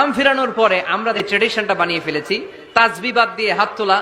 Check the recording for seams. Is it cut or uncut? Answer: cut